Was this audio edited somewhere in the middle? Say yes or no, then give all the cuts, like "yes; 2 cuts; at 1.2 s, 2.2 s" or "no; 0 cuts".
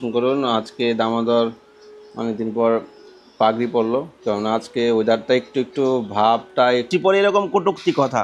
yes; 1 cut; at 6.9 s